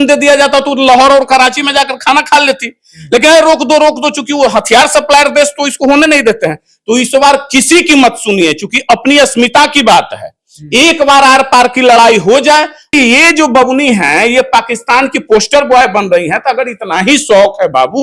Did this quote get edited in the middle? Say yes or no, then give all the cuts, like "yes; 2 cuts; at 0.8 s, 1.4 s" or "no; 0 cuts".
yes; 1 cut; at 12.9 s